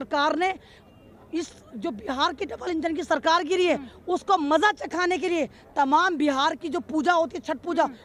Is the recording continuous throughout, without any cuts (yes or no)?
yes